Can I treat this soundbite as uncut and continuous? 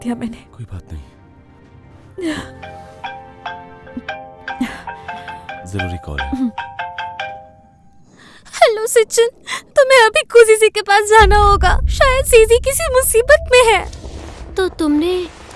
no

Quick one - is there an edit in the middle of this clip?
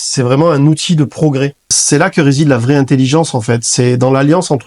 yes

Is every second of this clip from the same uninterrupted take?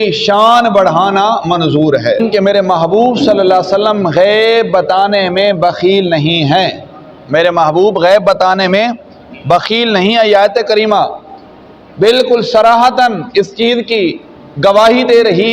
no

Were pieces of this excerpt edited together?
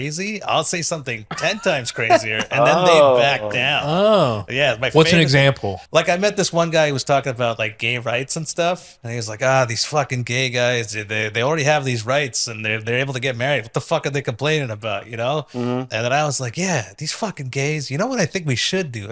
yes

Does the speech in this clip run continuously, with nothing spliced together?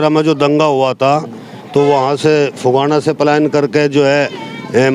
yes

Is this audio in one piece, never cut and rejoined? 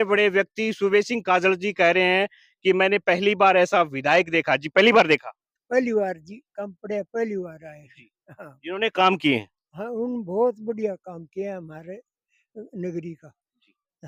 yes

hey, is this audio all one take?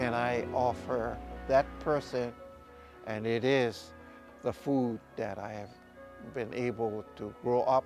no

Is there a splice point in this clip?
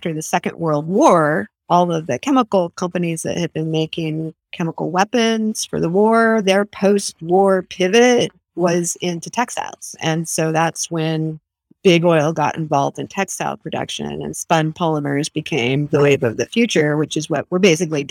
no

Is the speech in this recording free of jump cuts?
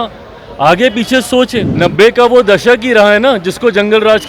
no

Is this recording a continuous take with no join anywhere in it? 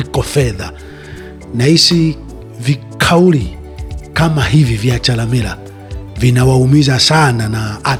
yes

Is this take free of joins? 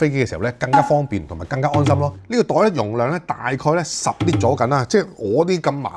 yes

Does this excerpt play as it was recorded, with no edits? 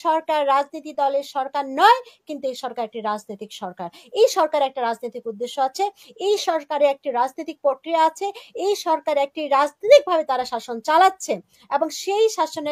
yes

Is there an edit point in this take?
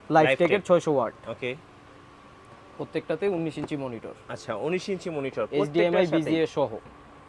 no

